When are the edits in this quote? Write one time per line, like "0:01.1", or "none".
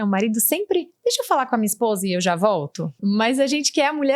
0:02.9